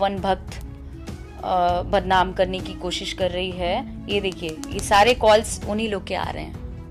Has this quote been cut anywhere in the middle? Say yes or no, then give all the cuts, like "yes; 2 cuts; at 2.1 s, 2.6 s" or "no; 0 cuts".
no; 0 cuts